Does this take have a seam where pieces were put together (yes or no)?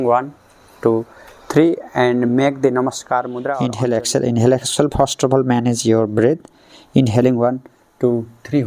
yes